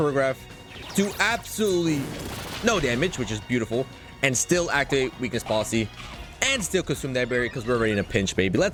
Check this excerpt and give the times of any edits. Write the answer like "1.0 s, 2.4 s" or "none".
none